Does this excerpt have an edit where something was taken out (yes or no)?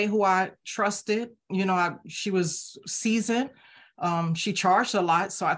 no